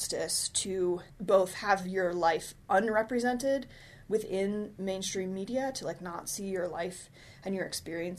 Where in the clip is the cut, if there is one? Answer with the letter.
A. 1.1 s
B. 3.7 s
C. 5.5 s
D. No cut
A